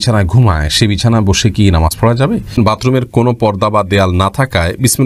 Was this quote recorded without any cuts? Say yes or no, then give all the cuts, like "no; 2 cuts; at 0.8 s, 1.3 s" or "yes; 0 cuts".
no; 1 cut; at 2.6 s